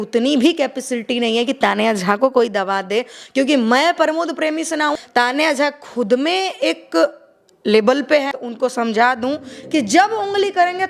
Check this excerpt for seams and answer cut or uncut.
cut